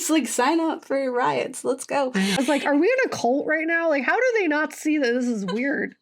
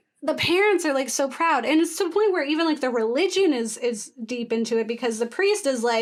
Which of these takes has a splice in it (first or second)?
first